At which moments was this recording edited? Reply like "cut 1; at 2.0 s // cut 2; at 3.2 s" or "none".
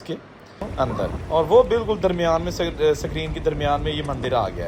cut 1; at 1.2 s